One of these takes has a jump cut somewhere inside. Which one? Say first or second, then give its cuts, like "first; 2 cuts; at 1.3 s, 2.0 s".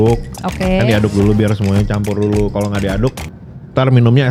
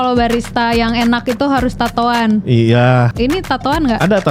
second; 1 cut; at 3.1 s